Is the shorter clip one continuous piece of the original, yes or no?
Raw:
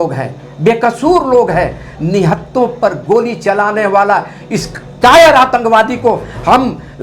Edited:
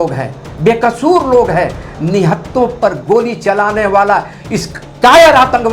yes